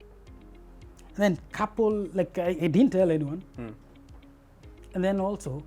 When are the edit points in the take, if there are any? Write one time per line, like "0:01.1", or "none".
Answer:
0:01.0